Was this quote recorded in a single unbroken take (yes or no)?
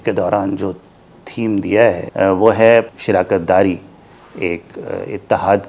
no